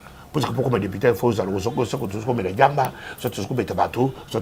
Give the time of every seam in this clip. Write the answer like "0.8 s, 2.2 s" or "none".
none